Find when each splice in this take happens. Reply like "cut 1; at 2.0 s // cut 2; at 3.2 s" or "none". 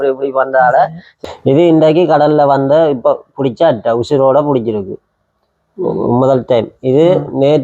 cut 1; at 1.1 s